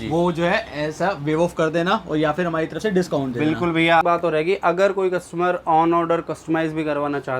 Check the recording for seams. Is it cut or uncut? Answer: cut